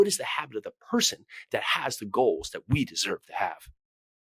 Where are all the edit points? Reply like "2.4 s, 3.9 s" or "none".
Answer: none